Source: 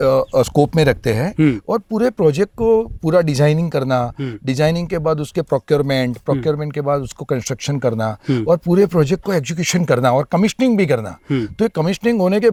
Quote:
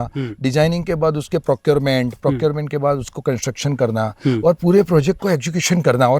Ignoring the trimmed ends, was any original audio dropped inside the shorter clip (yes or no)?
no